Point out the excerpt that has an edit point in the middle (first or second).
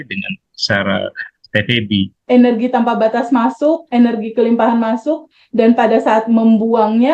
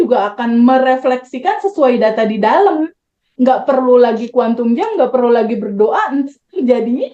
first